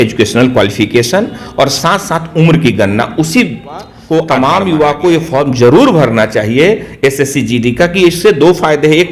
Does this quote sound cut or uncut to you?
cut